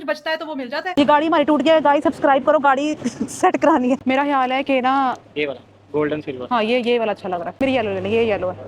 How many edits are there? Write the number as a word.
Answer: three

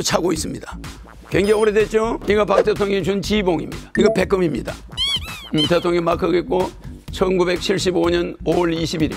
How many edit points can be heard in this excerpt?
two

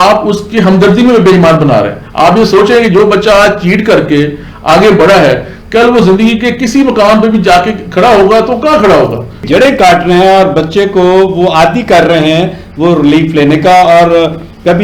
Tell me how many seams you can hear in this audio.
one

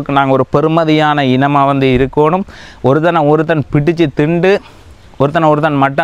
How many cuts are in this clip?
zero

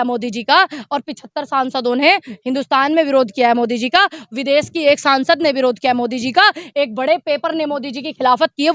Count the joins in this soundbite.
zero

